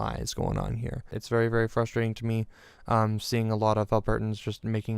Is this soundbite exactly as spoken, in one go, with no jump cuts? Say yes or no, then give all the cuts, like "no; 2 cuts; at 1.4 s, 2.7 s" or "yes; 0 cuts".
no; 1 cut; at 1.2 s